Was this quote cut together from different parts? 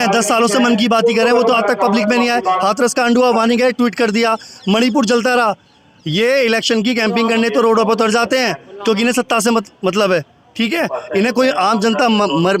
no; 0 cuts

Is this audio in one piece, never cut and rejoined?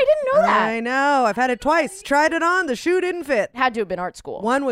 no; 2 cuts; at 2.0 s, 3.5 s

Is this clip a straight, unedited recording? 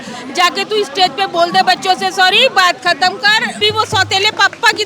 no; 1 cut; at 3.6 s

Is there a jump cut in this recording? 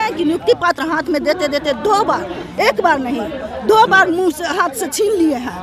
no; 0 cuts

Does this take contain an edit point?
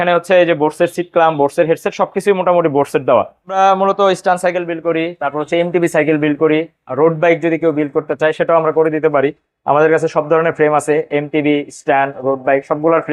yes; 1 cut; at 3.6 s

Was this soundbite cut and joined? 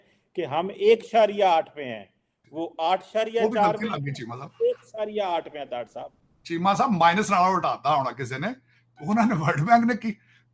no; 0 cuts

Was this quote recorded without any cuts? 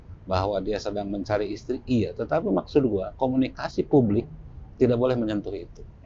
yes; 0 cuts

